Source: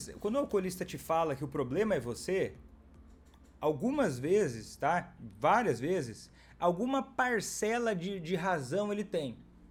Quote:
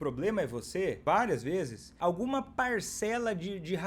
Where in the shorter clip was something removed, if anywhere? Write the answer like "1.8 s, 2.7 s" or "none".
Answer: 1.0 s, 1.8 s